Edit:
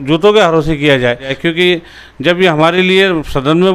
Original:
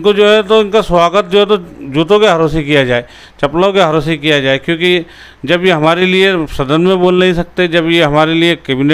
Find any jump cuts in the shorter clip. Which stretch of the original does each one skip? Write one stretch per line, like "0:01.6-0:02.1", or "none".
0:03.2-0:04.6